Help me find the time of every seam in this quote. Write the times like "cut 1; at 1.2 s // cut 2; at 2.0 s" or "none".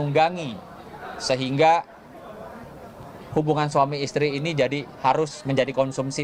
none